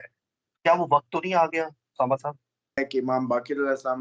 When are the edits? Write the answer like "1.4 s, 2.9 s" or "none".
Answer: 2.8 s